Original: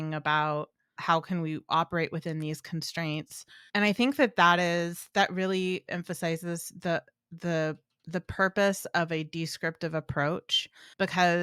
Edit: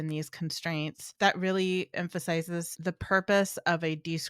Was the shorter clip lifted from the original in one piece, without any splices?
no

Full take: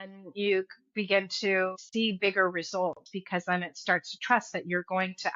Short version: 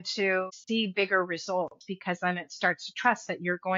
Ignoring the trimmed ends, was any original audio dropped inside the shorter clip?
no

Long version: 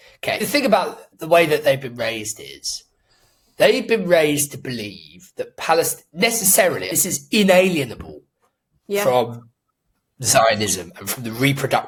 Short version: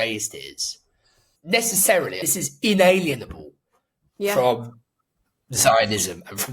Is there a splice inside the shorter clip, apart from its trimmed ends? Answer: yes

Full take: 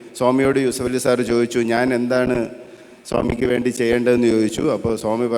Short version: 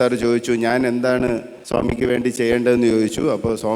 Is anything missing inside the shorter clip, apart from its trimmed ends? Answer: yes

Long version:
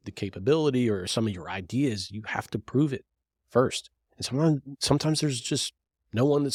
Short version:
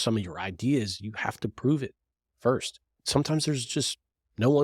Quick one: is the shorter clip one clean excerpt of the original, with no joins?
no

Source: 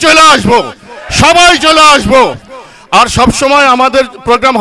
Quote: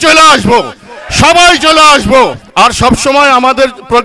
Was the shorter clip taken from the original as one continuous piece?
no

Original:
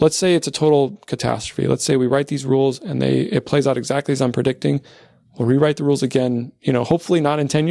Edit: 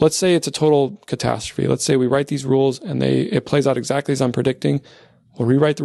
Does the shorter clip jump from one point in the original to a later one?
no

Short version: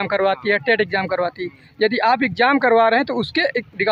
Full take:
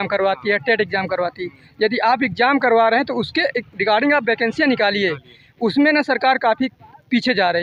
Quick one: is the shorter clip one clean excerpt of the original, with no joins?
yes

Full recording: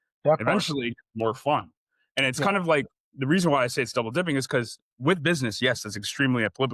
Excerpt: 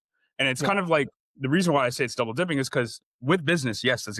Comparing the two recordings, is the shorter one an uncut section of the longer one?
yes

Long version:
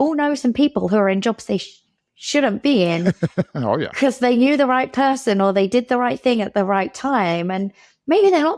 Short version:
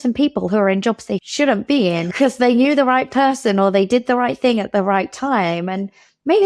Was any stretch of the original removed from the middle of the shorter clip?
yes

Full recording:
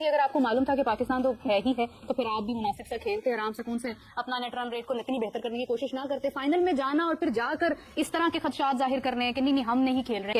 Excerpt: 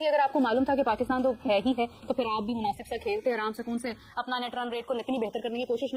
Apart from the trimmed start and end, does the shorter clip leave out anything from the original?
no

